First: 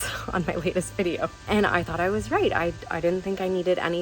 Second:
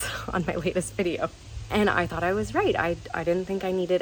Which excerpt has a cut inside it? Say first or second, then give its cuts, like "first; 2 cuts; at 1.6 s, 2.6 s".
first; 1 cut; at 1.4 s